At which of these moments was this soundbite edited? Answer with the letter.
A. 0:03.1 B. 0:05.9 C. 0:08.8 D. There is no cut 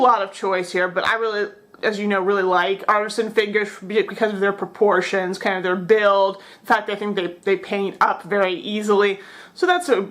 A